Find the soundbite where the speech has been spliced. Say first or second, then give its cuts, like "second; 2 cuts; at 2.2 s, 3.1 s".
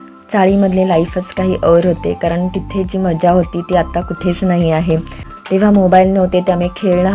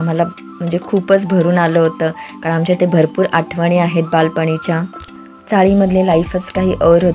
first; 1 cut; at 5.2 s